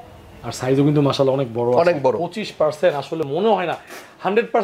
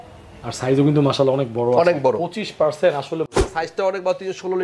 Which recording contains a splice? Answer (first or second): second